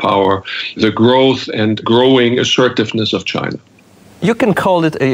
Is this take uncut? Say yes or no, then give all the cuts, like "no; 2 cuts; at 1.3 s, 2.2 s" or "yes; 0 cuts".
yes; 0 cuts